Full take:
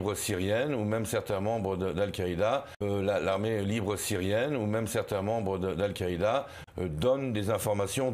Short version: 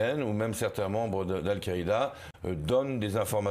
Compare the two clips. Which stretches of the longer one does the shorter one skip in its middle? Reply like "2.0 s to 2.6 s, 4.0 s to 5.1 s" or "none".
2.7 s to 6.5 s